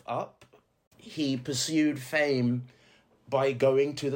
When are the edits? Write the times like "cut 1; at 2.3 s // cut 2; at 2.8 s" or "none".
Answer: cut 1; at 1.0 s